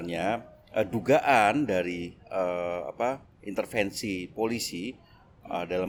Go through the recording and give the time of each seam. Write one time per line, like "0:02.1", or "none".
none